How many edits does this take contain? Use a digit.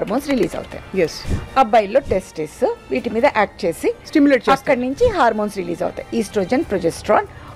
1